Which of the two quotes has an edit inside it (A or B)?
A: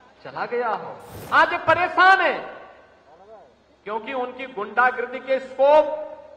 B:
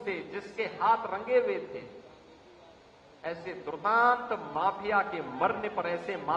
A